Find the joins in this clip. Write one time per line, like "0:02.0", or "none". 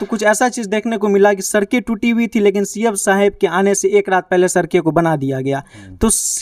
none